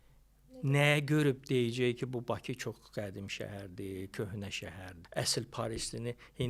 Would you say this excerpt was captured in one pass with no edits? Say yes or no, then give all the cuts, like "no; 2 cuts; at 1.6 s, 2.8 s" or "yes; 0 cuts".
no; 1 cut; at 5.0 s